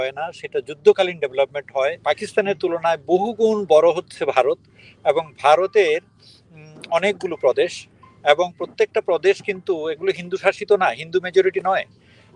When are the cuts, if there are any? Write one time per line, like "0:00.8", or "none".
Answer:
0:02.0